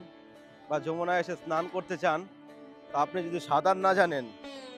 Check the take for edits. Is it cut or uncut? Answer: uncut